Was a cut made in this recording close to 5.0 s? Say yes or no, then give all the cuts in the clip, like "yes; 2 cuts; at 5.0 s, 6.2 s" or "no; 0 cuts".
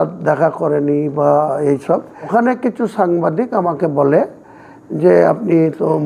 no; 1 cut; at 2.3 s